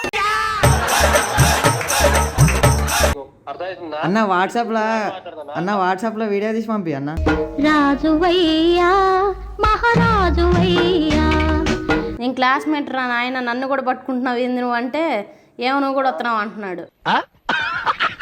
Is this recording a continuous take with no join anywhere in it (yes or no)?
no